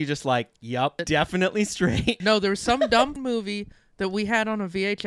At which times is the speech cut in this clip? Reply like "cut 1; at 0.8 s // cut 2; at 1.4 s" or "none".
cut 1; at 1.0 s // cut 2; at 2.2 s // cut 3; at 3.1 s